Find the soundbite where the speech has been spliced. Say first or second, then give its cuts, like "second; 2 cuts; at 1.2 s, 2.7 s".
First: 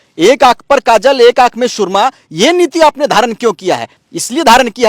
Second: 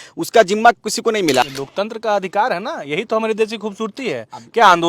second; 1 cut; at 1.4 s